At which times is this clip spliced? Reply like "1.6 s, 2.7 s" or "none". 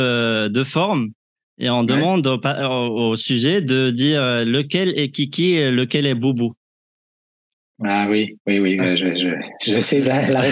none